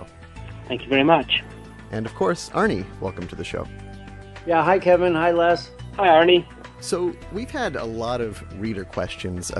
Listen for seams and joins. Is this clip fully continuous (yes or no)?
yes